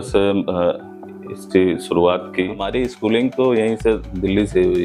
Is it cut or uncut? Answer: cut